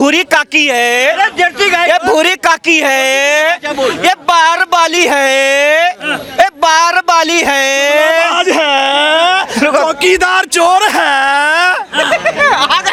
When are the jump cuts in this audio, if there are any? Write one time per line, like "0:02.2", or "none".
none